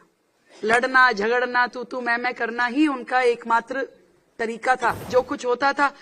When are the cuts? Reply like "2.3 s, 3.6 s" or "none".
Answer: 5.1 s